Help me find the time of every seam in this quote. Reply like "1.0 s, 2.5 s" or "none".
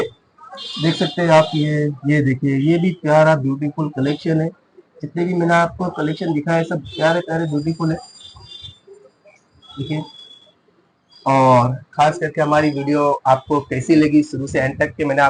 none